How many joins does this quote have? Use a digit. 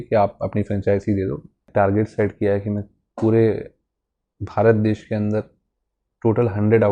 1